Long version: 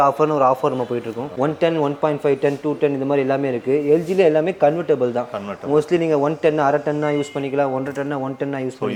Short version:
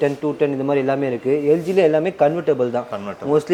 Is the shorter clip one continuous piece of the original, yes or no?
yes